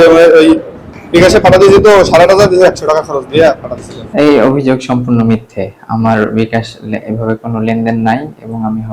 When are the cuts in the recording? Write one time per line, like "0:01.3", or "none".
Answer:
none